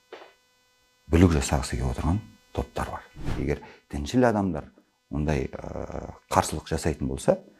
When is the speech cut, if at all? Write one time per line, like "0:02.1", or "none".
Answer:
0:03.3